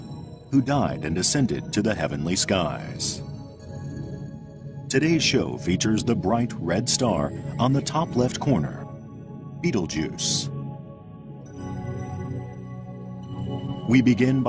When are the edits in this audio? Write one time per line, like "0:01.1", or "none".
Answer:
0:11.9